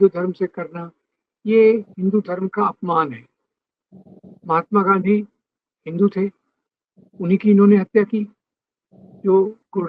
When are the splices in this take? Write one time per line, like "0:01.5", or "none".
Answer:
none